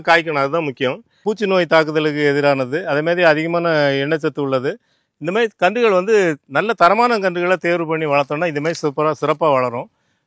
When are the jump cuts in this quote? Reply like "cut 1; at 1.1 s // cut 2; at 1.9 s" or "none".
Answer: cut 1; at 1.2 s

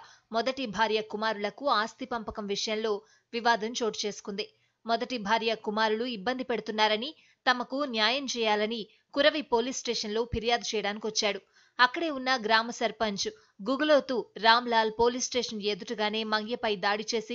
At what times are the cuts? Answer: none

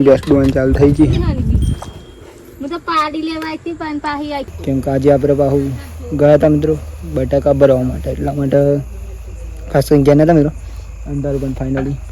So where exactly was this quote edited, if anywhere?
cut 1; at 4.5 s

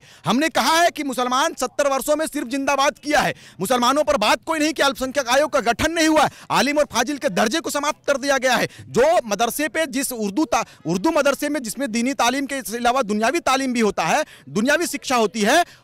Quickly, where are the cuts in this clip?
none

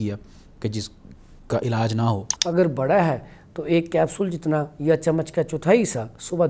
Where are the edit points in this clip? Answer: cut 1; at 2.3 s

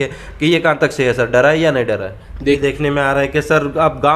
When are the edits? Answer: cut 1; at 2.6 s

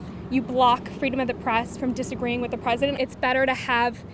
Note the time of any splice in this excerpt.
cut 1; at 3.0 s

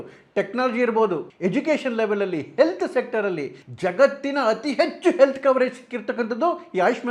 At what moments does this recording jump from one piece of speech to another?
cut 1; at 1.3 s

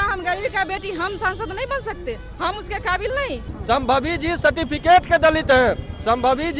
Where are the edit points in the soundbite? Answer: cut 1; at 3.6 s

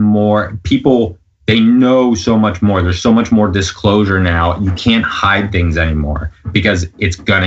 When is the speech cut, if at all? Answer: none

